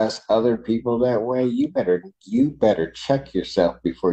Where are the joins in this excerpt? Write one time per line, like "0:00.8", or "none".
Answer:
none